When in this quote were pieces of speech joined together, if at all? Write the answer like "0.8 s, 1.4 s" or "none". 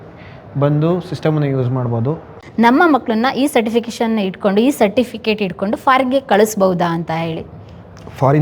2.3 s